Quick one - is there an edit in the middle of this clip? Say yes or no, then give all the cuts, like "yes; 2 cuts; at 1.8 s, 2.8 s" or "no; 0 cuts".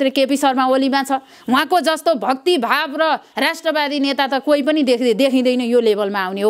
no; 0 cuts